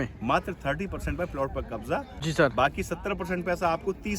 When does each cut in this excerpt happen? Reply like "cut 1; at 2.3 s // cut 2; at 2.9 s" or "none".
cut 1; at 2.1 s